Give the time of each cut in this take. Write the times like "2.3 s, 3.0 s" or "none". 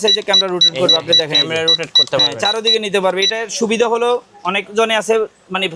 none